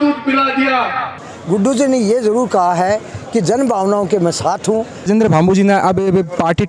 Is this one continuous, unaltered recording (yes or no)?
no